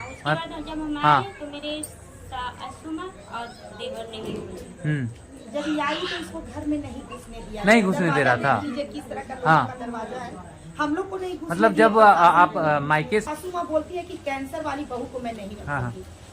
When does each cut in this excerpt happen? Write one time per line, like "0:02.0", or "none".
0:13.2